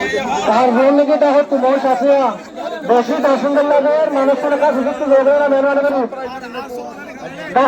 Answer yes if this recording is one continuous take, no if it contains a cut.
yes